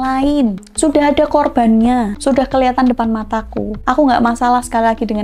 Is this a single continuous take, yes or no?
yes